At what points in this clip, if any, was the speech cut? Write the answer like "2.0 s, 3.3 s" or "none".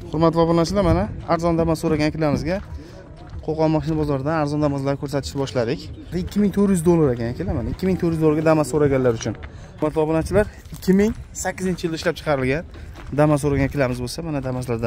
6.1 s, 9.8 s